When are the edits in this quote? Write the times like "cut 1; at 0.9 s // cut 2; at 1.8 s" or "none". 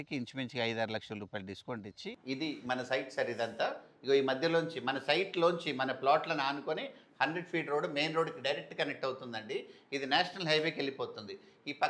cut 1; at 2.1 s